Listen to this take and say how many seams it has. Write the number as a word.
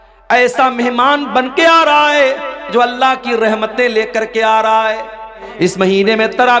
one